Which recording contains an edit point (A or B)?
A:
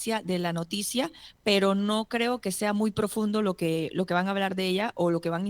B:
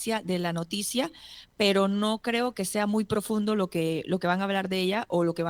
A